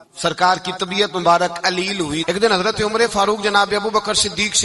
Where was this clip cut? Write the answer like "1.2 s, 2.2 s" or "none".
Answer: 2.2 s